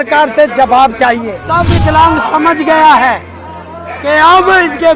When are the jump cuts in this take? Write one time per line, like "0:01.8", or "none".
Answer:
0:01.4